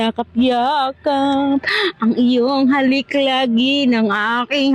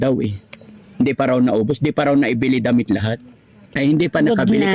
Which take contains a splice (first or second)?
second